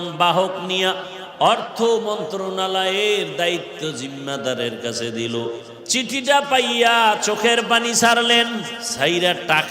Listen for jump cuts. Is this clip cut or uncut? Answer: cut